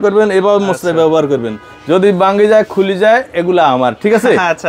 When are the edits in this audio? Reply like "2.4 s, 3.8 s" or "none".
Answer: none

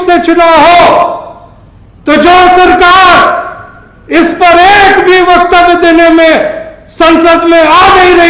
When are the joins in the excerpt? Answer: none

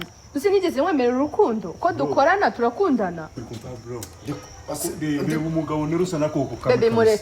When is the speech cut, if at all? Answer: 3.4 s

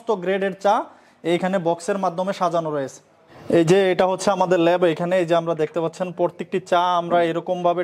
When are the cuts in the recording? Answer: none

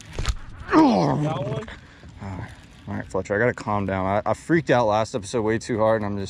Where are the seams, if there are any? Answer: none

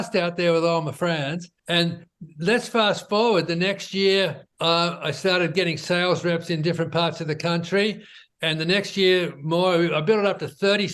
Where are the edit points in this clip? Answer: 1.5 s, 4.5 s

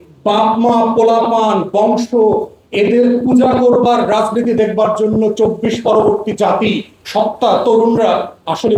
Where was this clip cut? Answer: none

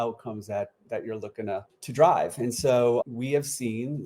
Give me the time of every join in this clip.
1.7 s

